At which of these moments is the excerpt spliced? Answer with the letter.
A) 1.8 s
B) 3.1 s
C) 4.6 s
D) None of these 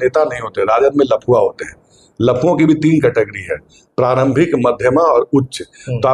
D